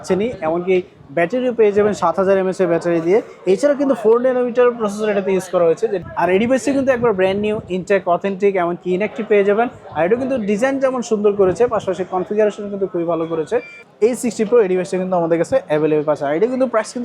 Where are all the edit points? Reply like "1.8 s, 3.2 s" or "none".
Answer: 6.0 s, 13.8 s